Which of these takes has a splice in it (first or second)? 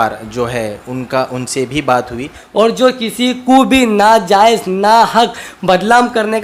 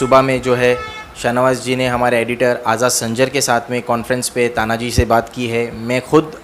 first